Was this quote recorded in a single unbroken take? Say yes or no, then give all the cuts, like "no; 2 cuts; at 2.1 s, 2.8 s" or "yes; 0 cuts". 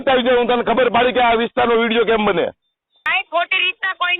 no; 1 cut; at 3.1 s